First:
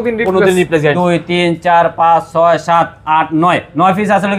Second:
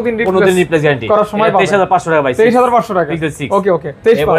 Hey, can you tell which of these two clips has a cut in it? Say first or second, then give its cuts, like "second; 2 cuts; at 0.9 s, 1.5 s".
first; 1 cut; at 1.0 s